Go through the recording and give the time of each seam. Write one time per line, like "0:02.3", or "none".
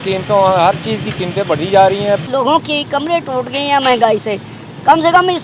0:02.3